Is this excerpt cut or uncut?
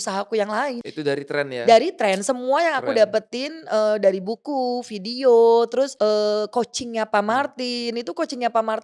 cut